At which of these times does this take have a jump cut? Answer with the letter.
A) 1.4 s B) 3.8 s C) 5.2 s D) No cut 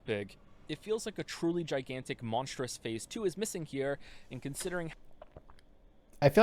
D